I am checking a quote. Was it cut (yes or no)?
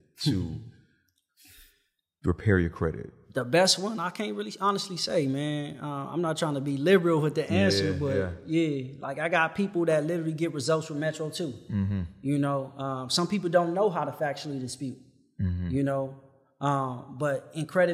yes